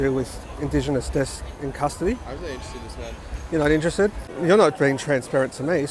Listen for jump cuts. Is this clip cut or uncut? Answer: cut